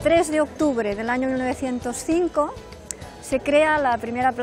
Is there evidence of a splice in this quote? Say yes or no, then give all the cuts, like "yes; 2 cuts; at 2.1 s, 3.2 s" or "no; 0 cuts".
no; 0 cuts